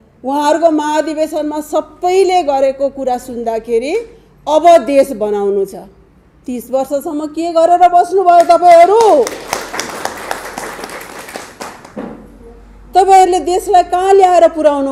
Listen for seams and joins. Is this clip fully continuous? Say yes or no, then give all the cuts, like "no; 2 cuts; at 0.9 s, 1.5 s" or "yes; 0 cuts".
yes; 0 cuts